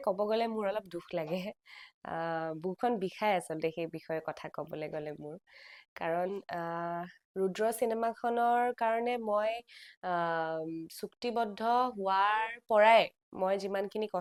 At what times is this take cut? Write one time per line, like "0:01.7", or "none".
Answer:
none

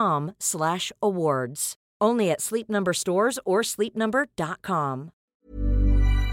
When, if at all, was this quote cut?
0:05.4

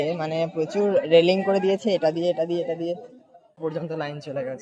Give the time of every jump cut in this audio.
0:03.6

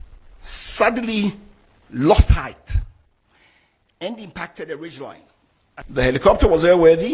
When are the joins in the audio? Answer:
0:05.8

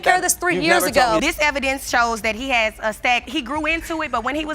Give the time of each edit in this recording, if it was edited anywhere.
0:01.2

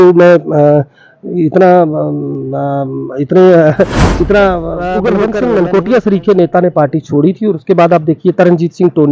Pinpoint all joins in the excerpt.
0:05.1

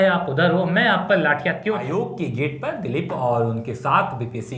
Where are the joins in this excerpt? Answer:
0:01.8

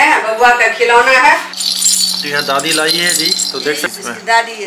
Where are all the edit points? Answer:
0:01.6

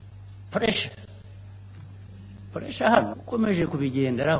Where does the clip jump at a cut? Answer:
0:03.2

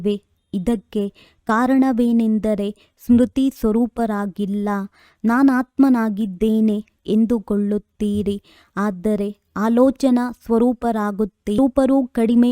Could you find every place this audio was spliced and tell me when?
0:02.0

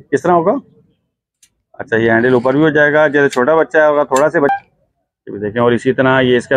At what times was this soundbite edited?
0:04.5

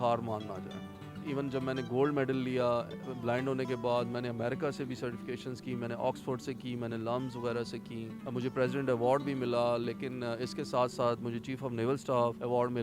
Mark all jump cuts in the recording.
none

